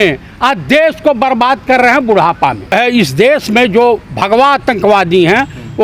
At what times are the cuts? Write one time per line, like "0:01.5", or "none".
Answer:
0:02.7